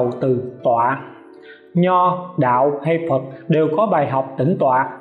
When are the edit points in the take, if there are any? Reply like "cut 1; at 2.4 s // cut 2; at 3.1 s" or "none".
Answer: none